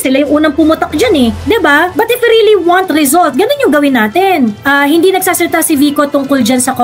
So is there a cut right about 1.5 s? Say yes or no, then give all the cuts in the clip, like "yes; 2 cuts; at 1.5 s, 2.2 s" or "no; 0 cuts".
no; 1 cut; at 4.6 s